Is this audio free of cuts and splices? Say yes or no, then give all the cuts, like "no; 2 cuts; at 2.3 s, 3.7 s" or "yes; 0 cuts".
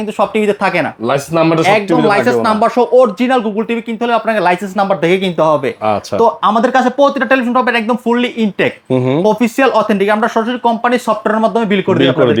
yes; 0 cuts